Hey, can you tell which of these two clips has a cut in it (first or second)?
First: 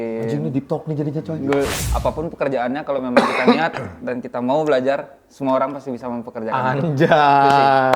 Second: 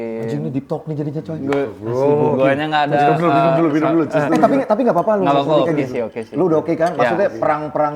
first